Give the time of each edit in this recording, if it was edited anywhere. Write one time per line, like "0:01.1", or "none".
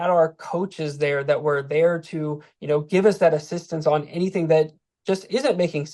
none